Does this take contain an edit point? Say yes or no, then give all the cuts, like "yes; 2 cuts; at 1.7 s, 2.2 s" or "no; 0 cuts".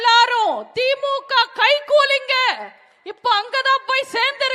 no; 0 cuts